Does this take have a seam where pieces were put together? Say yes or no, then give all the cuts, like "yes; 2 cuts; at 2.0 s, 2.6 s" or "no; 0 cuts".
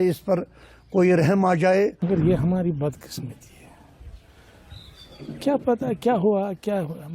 yes; 1 cut; at 2.0 s